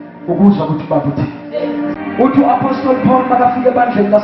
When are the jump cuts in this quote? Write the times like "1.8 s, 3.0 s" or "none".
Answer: 1.9 s